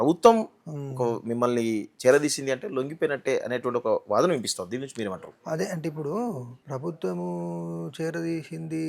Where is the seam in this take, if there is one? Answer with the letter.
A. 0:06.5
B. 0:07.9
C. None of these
A